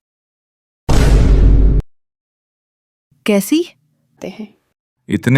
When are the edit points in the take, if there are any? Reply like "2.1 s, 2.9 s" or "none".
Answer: 4.1 s